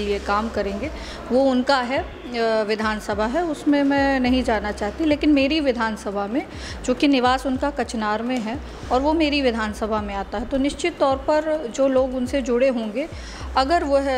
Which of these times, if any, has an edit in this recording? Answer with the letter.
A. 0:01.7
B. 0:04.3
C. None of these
C